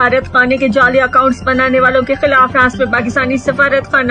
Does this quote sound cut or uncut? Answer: uncut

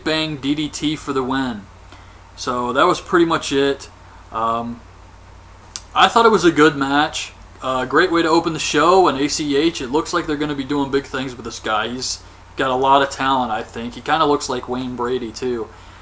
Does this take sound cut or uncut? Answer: uncut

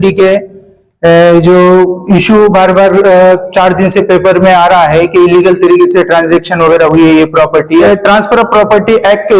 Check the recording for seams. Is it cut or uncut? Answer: cut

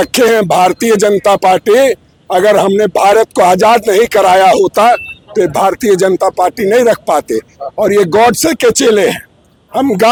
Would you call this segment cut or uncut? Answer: uncut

